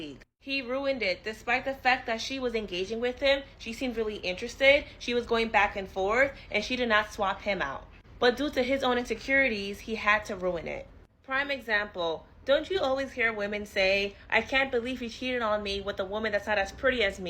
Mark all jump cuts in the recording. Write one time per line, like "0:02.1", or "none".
0:00.9
0:11.6